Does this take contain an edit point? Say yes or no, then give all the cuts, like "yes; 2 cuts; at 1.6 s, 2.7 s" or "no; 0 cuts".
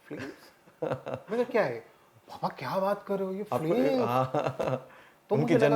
no; 0 cuts